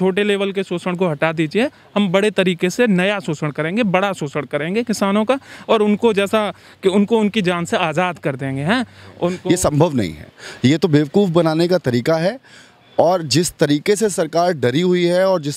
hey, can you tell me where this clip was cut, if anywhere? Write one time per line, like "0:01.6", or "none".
0:09.4